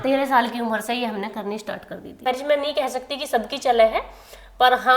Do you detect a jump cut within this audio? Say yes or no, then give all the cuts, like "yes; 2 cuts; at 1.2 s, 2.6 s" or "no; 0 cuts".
yes; 1 cut; at 2.3 s